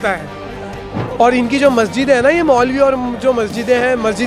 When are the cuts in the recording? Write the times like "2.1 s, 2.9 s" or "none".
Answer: 1.0 s